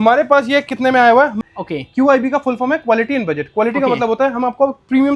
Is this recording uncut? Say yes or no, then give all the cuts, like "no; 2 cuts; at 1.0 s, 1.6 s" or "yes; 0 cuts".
no; 1 cut; at 1.4 s